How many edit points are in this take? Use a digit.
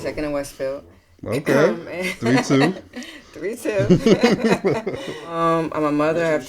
1